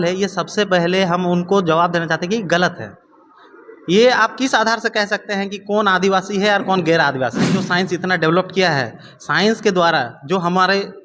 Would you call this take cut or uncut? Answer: cut